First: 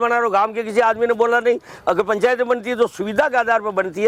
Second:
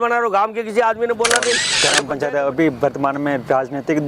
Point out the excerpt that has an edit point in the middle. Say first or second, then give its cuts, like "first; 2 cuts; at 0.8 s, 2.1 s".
second; 1 cut; at 1.7 s